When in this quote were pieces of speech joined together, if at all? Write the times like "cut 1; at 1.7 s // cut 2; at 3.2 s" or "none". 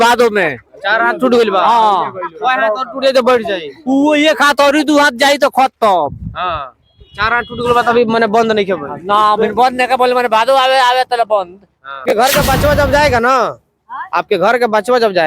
cut 1; at 12.0 s